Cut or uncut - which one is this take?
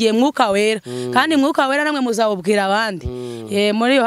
uncut